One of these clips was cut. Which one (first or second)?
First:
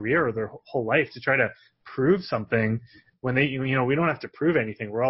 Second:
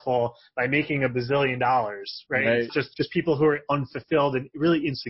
second